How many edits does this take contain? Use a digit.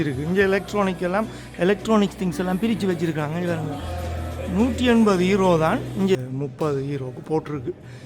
1